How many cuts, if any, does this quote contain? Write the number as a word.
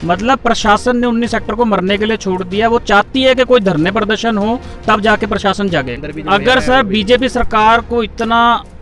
one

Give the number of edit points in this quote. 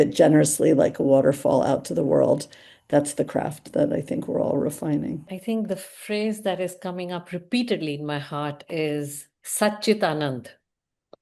one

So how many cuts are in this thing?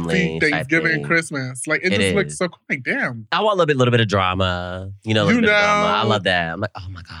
one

